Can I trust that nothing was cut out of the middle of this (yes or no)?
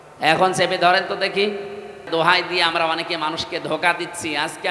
no